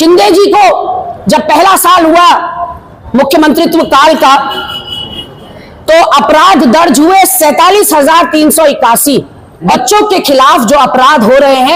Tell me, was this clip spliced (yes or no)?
yes